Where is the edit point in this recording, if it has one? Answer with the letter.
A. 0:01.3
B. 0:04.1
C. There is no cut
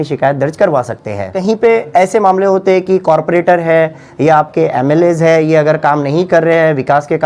A